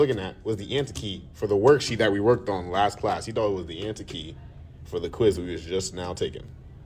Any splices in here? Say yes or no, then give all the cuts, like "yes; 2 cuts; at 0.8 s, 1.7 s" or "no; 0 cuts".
no; 0 cuts